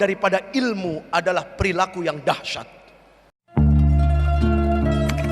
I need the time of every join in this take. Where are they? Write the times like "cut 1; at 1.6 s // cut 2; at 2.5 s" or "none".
cut 1; at 3.3 s